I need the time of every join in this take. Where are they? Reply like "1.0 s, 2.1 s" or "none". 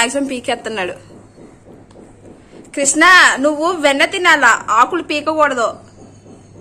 none